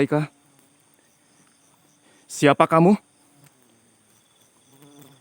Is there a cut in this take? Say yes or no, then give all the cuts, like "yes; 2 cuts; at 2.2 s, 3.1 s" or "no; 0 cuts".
no; 0 cuts